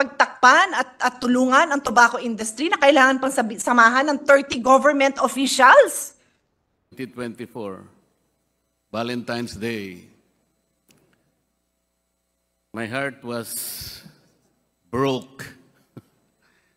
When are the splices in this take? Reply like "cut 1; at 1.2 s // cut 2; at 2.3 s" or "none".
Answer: cut 1; at 6.9 s